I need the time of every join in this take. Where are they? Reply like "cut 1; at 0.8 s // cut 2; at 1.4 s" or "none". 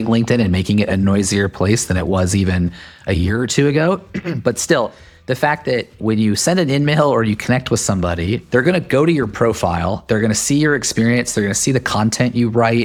none